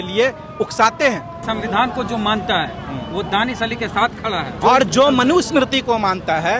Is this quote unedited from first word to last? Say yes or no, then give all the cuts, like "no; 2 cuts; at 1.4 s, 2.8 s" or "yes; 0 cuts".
no; 2 cuts; at 1.3 s, 4.5 s